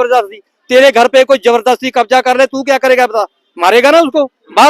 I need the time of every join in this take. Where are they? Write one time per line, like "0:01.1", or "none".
none